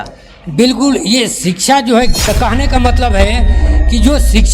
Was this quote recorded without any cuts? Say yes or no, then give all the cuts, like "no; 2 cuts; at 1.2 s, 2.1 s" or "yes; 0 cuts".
no; 1 cut; at 2.1 s